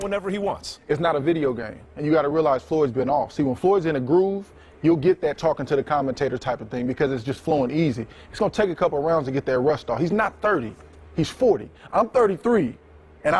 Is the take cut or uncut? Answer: uncut